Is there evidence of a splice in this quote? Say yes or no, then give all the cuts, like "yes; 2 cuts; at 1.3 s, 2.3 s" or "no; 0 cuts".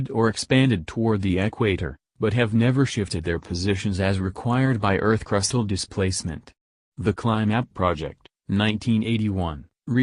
no; 0 cuts